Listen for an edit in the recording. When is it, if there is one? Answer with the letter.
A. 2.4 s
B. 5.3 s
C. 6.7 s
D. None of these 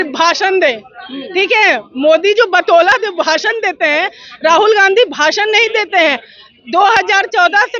D